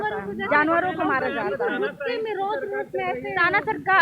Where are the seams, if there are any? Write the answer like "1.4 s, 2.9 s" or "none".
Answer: none